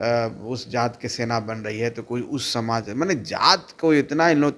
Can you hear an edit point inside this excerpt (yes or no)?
no